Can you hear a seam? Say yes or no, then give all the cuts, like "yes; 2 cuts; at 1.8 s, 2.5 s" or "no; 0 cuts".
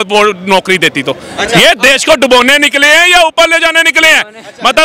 no; 0 cuts